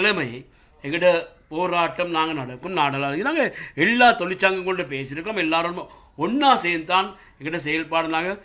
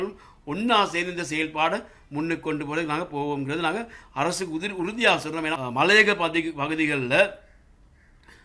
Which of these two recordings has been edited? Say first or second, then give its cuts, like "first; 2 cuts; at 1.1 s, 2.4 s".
second; 1 cut; at 5.5 s